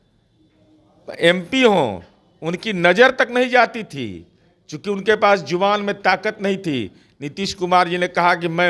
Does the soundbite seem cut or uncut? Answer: uncut